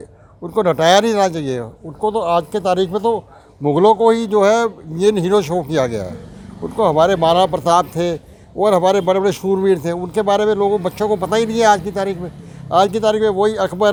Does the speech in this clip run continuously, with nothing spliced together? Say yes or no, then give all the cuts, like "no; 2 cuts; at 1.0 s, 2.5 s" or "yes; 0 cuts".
yes; 0 cuts